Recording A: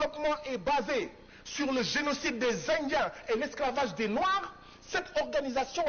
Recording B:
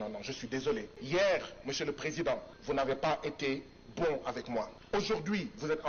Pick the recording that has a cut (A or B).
B